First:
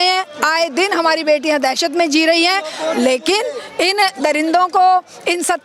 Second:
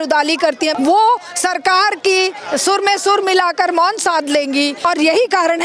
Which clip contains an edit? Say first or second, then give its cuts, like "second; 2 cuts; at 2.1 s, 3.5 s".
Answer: second; 3 cuts; at 0.7 s, 2.5 s, 4.8 s